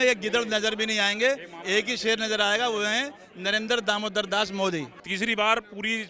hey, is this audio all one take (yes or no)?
no